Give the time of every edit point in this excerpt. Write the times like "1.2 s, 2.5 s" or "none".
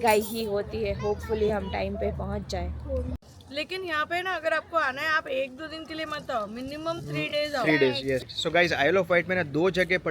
3.2 s, 8.3 s